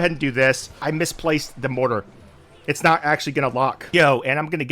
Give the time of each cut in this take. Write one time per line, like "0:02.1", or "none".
0:00.8
0:03.8